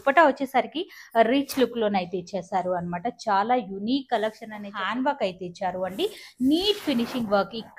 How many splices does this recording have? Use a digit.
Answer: 1